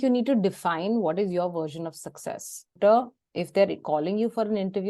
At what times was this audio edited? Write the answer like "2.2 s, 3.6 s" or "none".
2.8 s